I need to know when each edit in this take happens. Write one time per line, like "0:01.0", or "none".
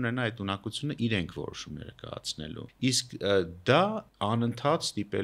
0:02.7
0:04.0